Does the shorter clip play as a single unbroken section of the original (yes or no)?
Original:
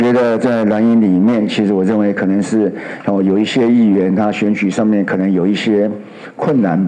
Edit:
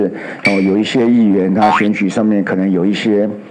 yes